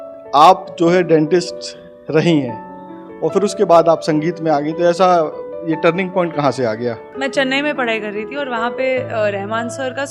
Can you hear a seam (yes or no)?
yes